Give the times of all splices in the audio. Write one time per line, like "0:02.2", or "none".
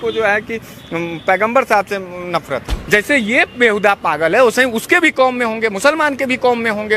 0:02.7

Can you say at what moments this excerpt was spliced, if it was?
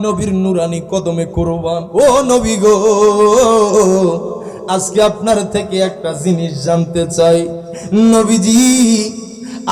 0:01.8

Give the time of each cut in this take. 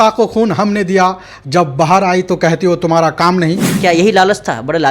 0:03.8

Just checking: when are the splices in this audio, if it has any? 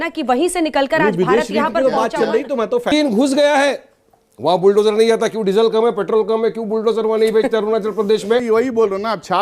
0:02.9
0:08.4

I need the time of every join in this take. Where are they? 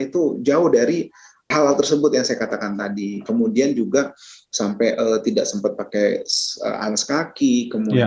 0:01.5

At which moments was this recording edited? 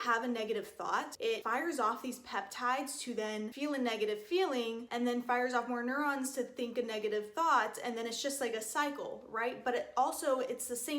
0:01.3
0:03.5

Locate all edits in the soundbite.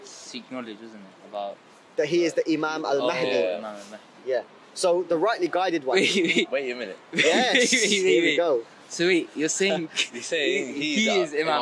0:05.1

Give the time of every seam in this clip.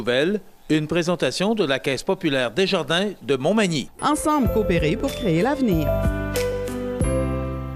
none

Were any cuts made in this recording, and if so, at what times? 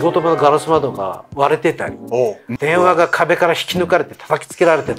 none

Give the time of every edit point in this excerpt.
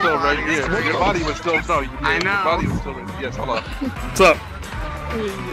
0:04.0

